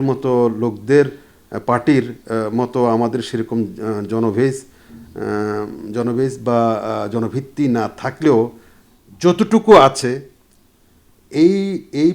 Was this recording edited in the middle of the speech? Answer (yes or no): no